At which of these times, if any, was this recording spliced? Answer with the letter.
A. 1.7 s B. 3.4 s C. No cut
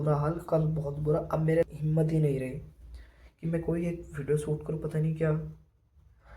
A